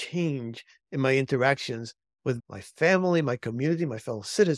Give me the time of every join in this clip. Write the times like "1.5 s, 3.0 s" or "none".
2.4 s